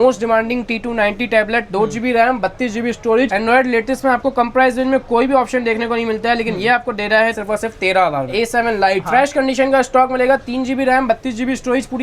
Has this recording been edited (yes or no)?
yes